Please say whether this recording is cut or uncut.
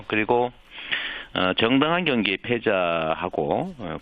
cut